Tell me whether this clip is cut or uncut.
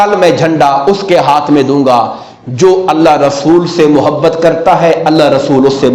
uncut